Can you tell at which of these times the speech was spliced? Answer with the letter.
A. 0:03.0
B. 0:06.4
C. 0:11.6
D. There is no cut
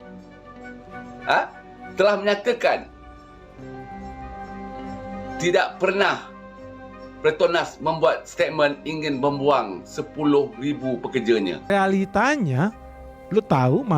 C